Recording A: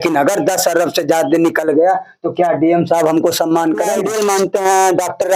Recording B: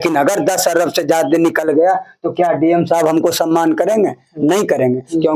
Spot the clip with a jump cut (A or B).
A